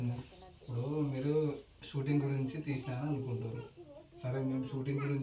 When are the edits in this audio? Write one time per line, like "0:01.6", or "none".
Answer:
none